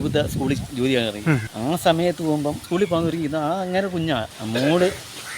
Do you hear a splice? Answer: yes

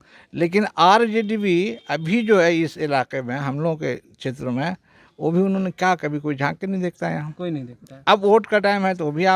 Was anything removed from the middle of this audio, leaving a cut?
no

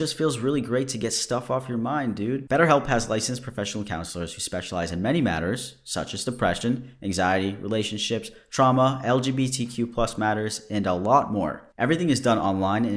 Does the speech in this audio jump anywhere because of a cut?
no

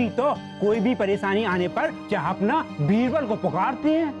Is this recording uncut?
no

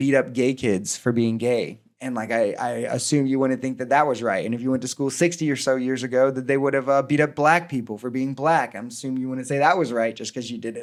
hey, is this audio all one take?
yes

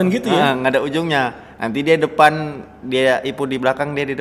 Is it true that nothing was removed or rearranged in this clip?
yes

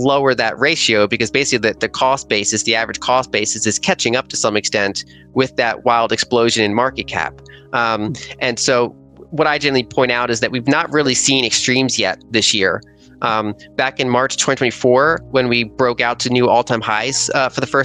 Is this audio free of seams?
yes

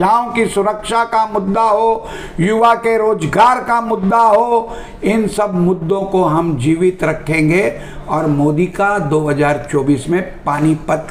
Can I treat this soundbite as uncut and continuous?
yes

